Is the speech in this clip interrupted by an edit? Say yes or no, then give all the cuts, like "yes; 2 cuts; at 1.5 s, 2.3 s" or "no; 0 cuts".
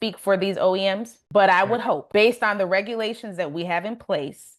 yes; 2 cuts; at 1.1 s, 2.0 s